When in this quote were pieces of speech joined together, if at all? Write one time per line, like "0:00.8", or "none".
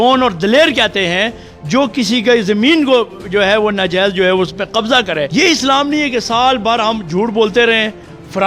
0:05.3